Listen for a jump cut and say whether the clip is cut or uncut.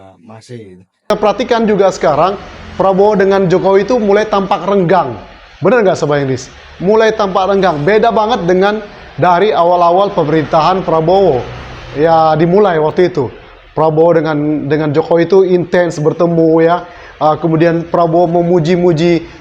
cut